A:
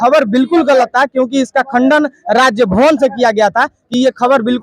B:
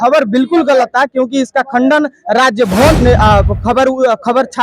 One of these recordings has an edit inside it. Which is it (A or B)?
B